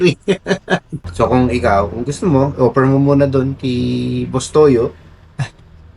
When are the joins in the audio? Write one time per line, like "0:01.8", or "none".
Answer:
0:00.9